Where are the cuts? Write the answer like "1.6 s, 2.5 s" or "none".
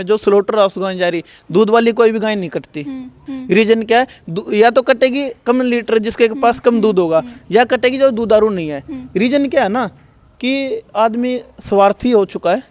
none